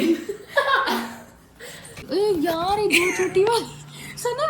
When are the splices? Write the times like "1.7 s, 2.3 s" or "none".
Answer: 2.0 s